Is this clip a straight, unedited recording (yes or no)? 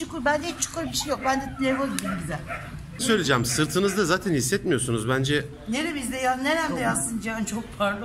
no